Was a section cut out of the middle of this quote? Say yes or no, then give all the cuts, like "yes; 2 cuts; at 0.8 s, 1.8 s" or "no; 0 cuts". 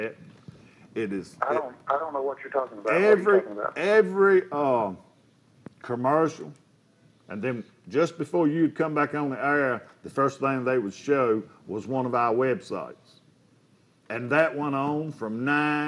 no; 0 cuts